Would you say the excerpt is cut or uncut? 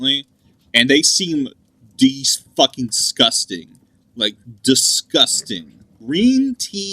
cut